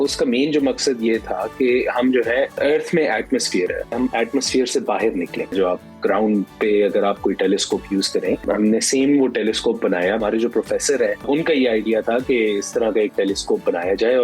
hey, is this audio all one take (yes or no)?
no